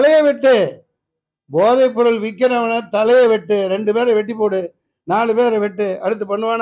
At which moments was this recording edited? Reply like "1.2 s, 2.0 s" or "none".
none